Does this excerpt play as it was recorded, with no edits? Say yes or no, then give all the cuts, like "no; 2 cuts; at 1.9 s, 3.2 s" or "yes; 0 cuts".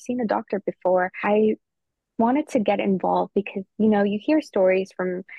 no; 1 cut; at 1.2 s